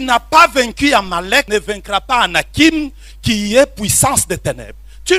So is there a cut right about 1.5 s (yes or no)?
yes